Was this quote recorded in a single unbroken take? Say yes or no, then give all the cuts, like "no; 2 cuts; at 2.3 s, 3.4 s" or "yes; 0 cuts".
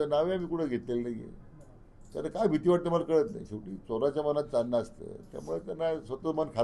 yes; 0 cuts